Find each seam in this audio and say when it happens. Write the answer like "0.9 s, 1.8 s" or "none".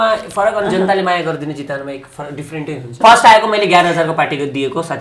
3.0 s